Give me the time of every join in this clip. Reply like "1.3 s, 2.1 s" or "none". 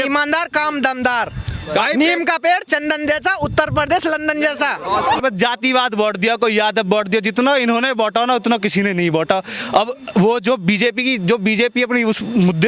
5.2 s